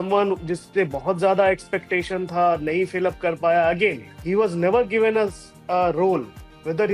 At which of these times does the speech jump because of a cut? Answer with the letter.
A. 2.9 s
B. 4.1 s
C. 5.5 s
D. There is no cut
B